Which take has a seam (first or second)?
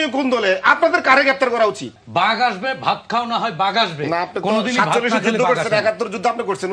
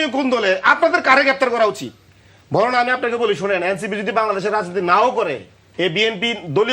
first